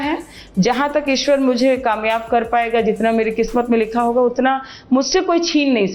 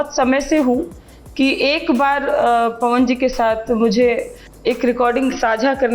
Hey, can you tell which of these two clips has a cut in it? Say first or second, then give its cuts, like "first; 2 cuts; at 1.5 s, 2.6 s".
second; 1 cut; at 4.4 s